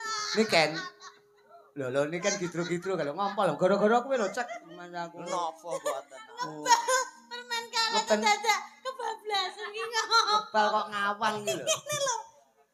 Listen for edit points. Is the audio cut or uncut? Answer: uncut